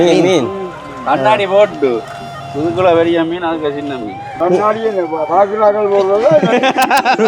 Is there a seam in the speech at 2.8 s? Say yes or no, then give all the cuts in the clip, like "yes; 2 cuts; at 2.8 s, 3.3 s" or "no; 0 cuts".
no; 1 cut; at 4.3 s